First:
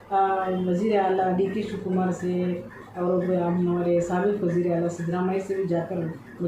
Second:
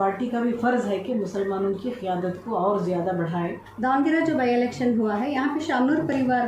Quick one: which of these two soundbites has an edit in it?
second; 1 cut; at 3.6 s

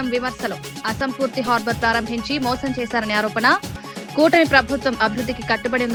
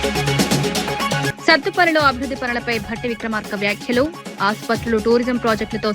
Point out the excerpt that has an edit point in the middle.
second; 1 cut; at 1.3 s

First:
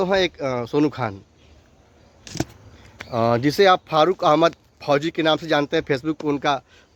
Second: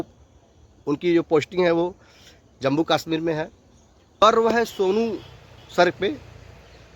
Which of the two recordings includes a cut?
second; 1 cut; at 4.2 s

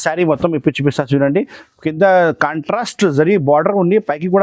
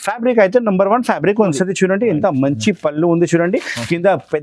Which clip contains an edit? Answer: second; 1 cut; at 1.5 s

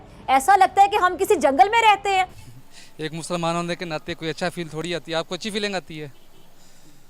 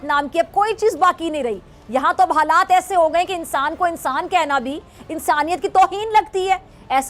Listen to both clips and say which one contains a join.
first; 1 cut; at 2.4 s

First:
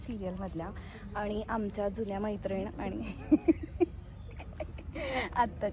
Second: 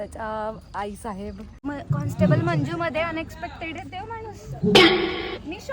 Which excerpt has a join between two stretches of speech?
second; 1 cut; at 1.6 s

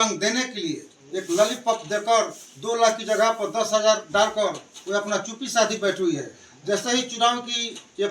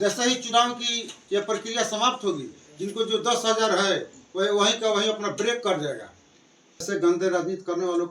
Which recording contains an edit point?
second; 1 cut; at 6.8 s

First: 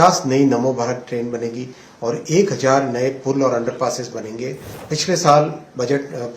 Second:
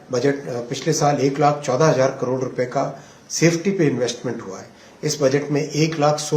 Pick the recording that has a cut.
first; 1 cut; at 4.7 s

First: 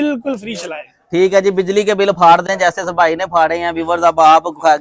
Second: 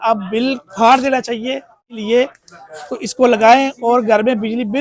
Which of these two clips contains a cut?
second; 1 cut; at 2.0 s

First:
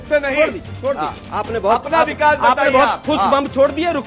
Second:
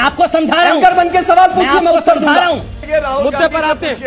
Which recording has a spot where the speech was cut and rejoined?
second; 1 cut; at 2.8 s

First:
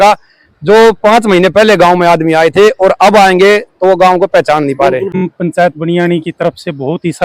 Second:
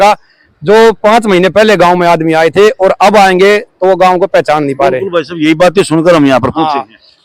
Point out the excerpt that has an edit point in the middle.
first; 1 cut; at 5.2 s

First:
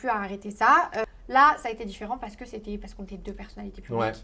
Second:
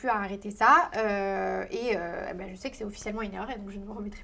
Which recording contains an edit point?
first; 1 cut; at 1.0 s

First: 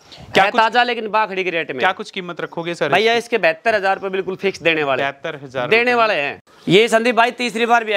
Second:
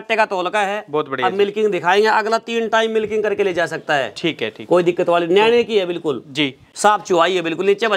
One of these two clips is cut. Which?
first; 1 cut; at 6.5 s

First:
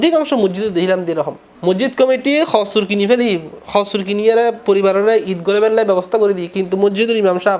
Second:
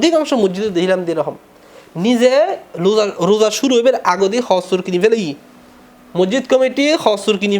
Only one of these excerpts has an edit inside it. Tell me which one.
first; 1 cut; at 1.4 s

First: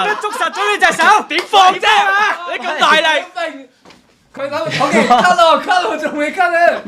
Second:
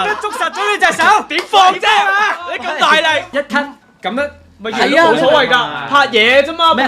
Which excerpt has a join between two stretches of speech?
second; 1 cut; at 3.3 s

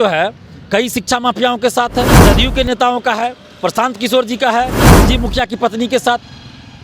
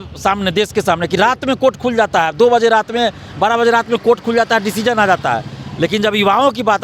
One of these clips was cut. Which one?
first; 2 cuts; at 2.2 s, 4.8 s

